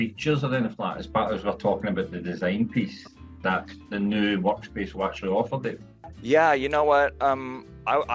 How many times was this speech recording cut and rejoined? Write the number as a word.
zero